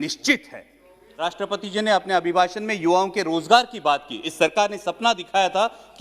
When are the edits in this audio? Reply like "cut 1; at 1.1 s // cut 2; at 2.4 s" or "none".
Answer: cut 1; at 1.2 s